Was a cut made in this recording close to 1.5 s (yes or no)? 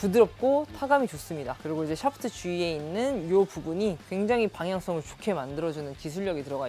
no